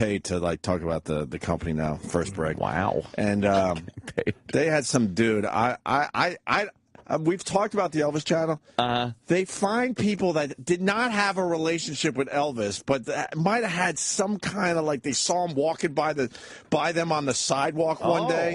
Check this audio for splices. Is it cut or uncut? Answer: cut